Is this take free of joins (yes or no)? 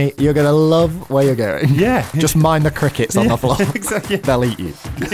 no